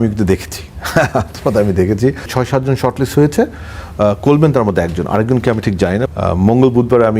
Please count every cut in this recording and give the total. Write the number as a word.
two